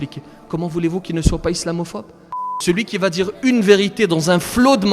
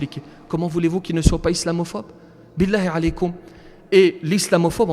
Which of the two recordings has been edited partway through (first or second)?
first